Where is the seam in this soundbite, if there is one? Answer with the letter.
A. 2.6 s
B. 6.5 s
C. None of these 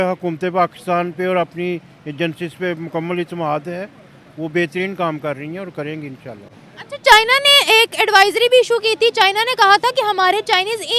C